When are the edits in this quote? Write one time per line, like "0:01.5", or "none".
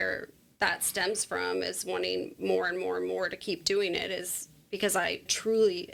none